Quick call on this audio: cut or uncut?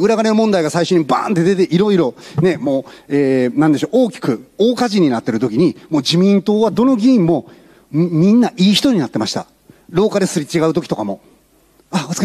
uncut